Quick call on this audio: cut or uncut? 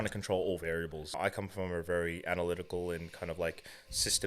cut